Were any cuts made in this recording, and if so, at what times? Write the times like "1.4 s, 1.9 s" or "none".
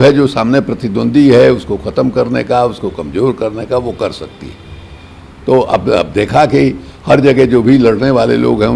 none